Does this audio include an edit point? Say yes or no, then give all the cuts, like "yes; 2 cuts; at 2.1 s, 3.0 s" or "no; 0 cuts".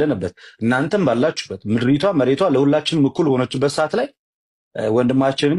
no; 0 cuts